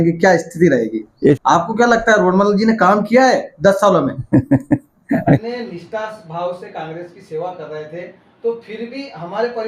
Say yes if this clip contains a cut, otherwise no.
yes